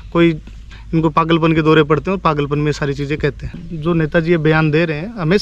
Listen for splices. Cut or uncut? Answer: cut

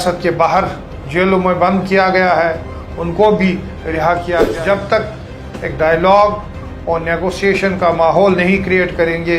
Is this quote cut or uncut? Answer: cut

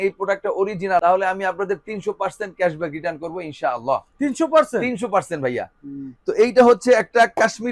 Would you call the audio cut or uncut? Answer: uncut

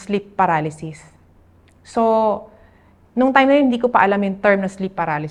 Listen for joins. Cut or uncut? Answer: uncut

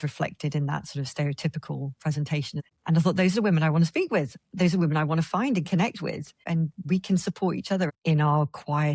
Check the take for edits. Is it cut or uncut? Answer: cut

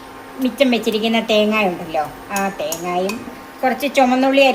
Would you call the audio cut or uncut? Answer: cut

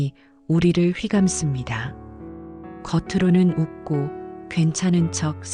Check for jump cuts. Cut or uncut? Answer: uncut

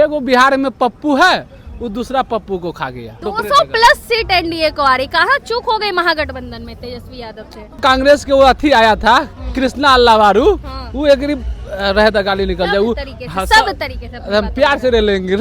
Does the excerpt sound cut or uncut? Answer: cut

